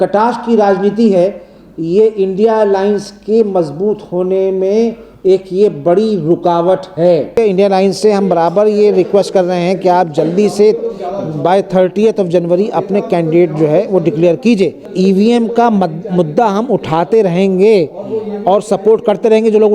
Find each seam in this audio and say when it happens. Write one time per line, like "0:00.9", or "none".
0:07.3
0:14.9